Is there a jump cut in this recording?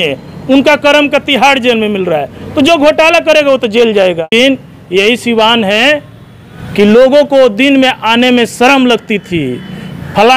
yes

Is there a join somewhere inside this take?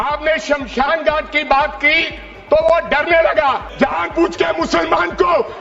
yes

